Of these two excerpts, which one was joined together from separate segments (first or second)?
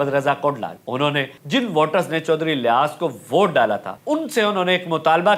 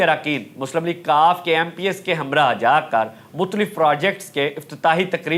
first